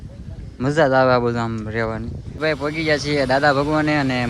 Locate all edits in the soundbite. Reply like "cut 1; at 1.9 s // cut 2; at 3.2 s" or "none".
cut 1; at 2.4 s